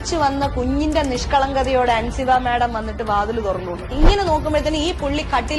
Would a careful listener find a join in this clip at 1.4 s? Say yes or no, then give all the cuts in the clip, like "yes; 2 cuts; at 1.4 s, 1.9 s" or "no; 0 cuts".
no; 0 cuts